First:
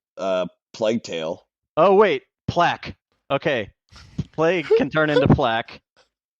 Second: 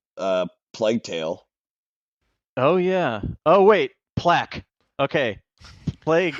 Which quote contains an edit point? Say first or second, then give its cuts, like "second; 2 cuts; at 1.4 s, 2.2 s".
first; 1 cut; at 1.6 s